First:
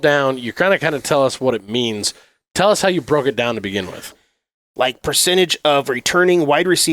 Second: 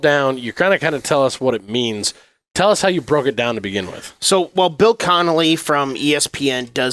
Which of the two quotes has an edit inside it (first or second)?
first